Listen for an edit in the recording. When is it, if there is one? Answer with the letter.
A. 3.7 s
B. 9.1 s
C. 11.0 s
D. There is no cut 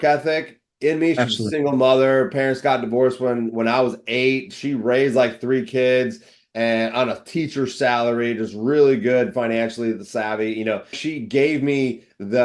C